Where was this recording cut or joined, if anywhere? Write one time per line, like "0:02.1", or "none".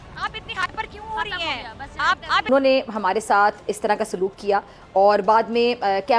0:02.5